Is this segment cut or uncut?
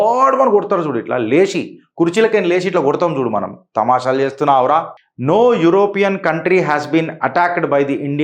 cut